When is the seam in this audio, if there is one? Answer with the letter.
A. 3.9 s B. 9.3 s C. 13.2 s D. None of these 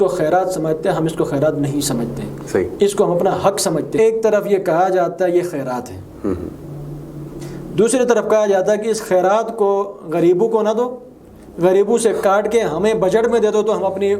A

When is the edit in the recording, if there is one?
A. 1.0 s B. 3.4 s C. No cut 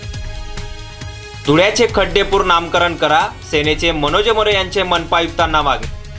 A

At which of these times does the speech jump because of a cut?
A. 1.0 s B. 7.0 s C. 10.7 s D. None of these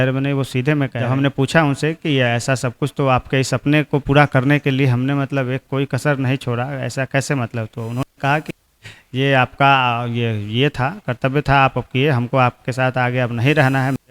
A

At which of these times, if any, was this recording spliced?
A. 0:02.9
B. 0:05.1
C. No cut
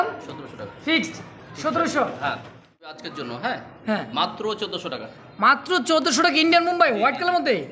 A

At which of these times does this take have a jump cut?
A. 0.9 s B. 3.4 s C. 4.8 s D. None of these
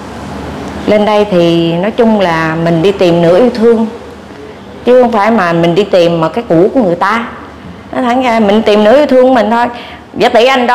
D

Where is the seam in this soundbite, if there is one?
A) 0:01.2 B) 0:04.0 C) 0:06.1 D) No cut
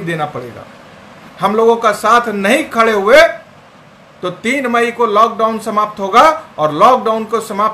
A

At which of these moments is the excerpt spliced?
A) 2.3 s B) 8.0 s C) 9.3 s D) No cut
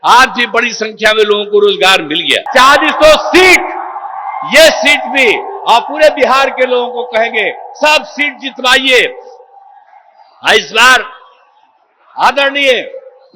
A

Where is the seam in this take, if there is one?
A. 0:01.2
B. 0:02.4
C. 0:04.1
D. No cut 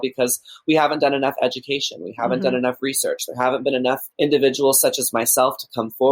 C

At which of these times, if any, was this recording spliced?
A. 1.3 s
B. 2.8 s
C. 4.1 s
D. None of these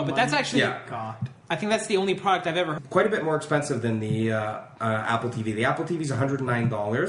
D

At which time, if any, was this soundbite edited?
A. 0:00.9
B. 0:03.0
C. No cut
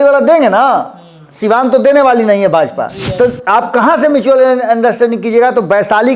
B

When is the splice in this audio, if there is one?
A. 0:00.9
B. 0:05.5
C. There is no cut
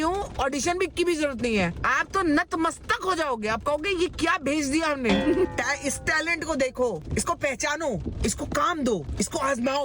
B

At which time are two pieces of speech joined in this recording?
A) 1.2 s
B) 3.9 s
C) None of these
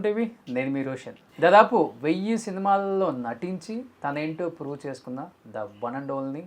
A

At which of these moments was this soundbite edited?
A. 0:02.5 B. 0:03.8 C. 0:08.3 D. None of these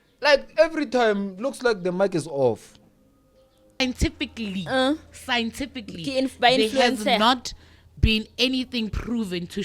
B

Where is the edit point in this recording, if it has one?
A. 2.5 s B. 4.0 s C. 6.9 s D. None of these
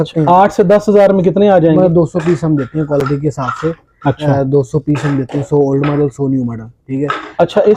D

